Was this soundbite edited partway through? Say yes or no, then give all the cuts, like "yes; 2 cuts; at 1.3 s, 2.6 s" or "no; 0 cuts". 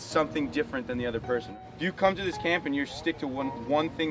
yes; 1 cut; at 1.5 s